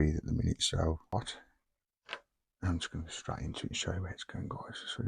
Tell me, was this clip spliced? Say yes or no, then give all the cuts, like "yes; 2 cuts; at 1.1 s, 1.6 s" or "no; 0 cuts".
yes; 1 cut; at 1.1 s